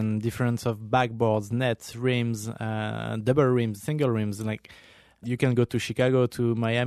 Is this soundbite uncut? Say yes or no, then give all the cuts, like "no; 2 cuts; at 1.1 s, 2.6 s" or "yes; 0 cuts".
no; 1 cut; at 5.2 s